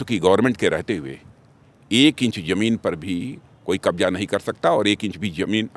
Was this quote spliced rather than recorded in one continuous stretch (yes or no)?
no